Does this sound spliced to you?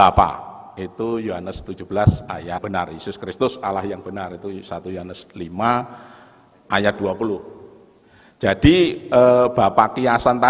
yes; 1 cut; at 2.6 s

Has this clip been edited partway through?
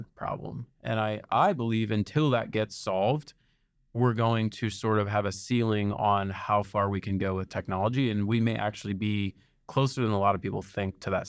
no; 0 cuts

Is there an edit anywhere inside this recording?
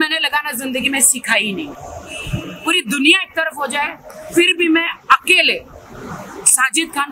no; 0 cuts

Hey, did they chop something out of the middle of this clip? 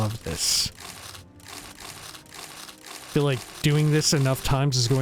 yes; 1 cut; at 3.1 s

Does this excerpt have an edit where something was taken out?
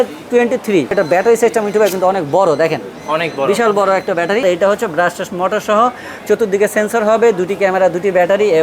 yes; 2 cuts; at 0.9 s, 4.4 s

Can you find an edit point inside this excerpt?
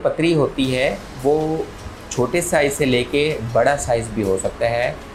no; 0 cuts

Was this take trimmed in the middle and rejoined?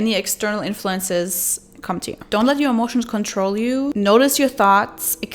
yes; 2 cuts; at 2.2 s, 3.9 s

